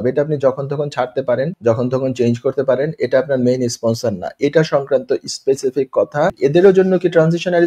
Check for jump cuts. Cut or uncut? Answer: cut